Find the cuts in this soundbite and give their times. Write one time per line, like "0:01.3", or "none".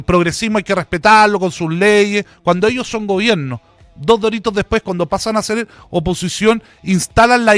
none